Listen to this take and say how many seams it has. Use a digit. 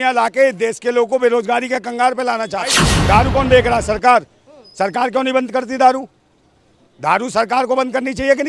1